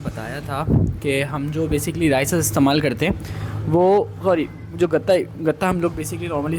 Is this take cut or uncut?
uncut